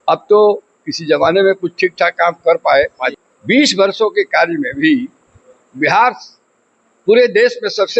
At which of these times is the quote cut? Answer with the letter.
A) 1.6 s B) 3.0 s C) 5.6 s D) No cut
B